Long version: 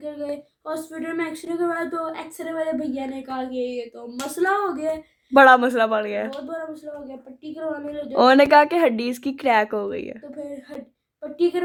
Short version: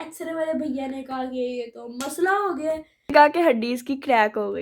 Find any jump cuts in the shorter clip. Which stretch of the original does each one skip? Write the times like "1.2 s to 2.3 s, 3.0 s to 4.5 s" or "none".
5.3 s to 8.5 s

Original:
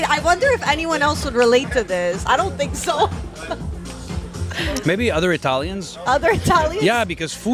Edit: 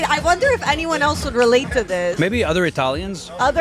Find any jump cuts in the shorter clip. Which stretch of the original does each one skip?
2.2 s to 4.8 s

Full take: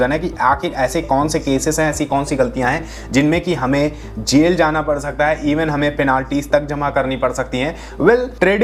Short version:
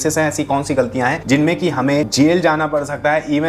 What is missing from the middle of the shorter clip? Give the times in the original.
2.8 s to 3.0 s, 3.9 s to 4.2 s

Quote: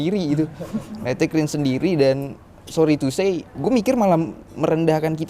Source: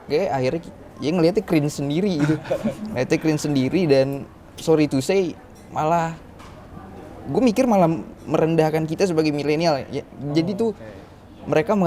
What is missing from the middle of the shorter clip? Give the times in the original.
5.4 s to 7.2 s

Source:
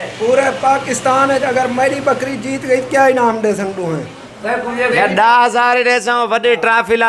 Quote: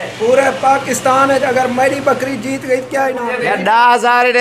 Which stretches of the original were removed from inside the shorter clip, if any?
3.2 s to 4.8 s

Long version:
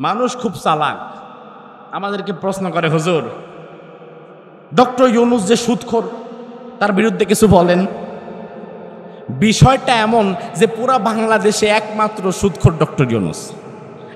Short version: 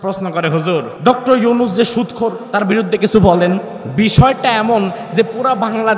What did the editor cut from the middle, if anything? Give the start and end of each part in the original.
3.3 s to 4.6 s, 6.1 s to 6.7 s, 8.0 s to 9.2 s

